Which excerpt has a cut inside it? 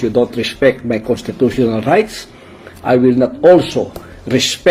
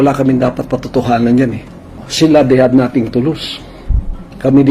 second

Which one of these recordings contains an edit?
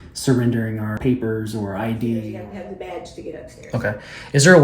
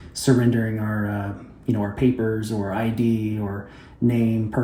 first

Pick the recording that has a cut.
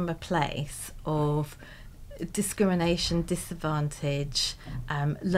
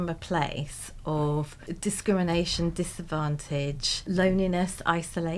second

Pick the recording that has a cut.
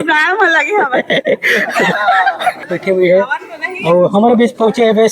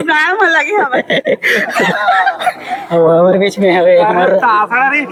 first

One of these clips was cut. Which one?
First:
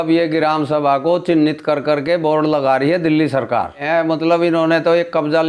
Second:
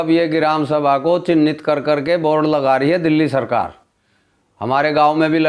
first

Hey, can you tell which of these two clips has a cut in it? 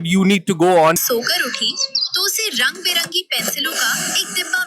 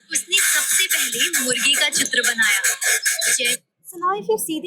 first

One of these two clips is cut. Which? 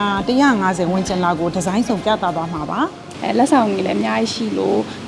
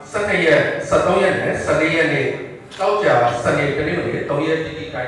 first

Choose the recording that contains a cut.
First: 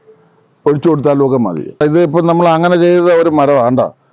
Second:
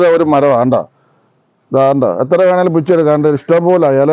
first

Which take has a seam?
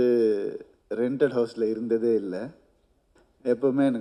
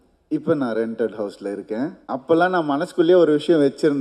second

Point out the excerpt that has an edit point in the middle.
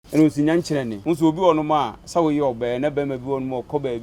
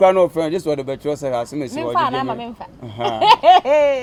first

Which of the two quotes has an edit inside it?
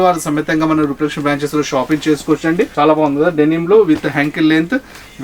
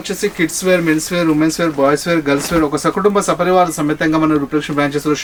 first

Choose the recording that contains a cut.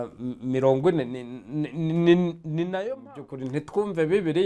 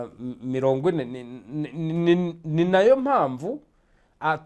first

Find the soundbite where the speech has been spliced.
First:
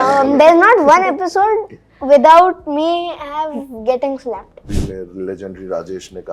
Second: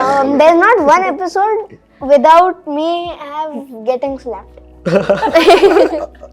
first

